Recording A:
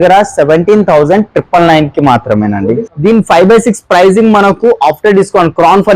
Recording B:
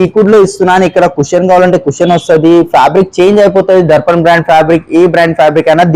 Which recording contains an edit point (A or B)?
A